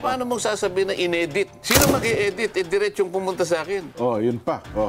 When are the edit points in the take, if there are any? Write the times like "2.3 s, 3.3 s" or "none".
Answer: 1.6 s, 3.9 s